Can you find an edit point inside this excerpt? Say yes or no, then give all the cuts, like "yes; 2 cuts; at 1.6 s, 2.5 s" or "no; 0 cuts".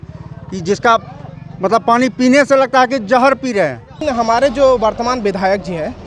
yes; 1 cut; at 4.0 s